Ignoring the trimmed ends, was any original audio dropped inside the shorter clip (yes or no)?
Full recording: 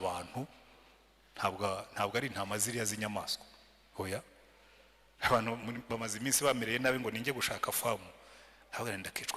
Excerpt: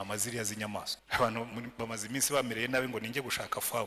yes